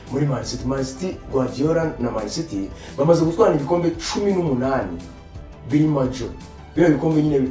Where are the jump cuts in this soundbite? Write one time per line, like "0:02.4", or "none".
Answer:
none